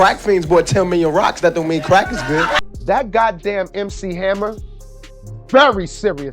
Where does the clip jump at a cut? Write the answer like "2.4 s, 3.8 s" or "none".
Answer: 2.6 s